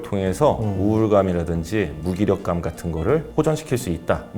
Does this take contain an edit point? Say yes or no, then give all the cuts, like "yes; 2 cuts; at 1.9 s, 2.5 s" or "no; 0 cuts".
no; 0 cuts